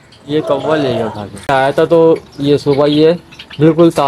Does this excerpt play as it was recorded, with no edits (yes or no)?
no